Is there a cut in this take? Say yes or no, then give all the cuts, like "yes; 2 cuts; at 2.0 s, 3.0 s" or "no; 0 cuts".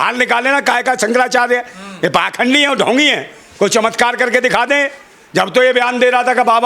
no; 0 cuts